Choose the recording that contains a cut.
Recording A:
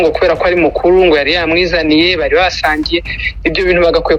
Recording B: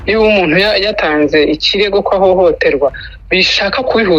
B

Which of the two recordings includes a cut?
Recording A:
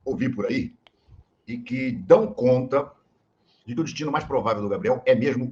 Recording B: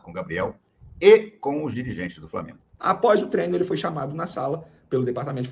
B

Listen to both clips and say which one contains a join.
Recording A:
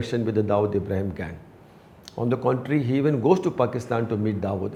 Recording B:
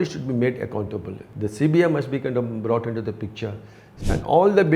B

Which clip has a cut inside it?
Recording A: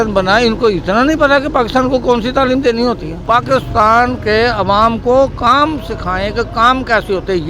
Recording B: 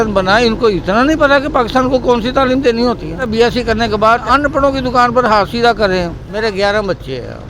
B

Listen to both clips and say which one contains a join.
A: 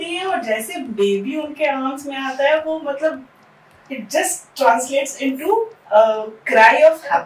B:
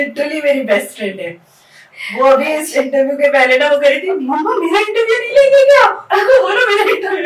A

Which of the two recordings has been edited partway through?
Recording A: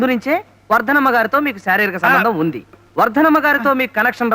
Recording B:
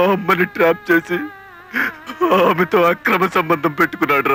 A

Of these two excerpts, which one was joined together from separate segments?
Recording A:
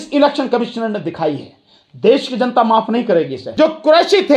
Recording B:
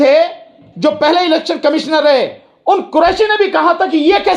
A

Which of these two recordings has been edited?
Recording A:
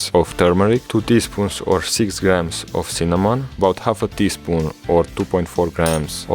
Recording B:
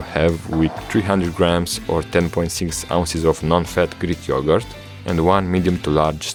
A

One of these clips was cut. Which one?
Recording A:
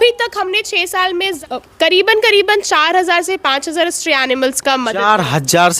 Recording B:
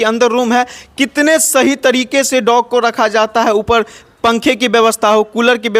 A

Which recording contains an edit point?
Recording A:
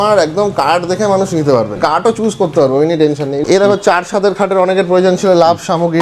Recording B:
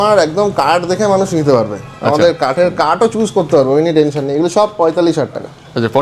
A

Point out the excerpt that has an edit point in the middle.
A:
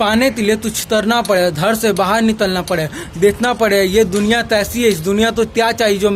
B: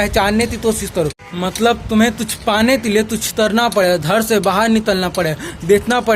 B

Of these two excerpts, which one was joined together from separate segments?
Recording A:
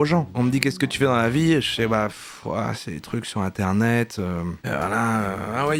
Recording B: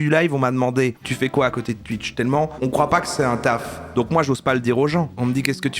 B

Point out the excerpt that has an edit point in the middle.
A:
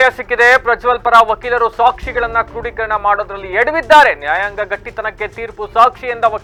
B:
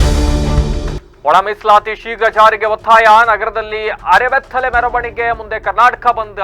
B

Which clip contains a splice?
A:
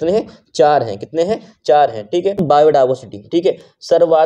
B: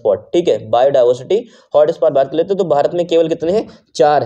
A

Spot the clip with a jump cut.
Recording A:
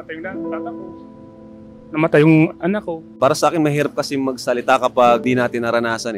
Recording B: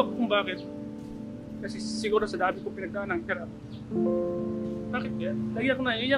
A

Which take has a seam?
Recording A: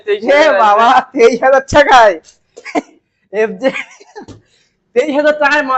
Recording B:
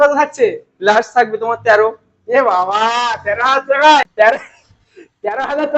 B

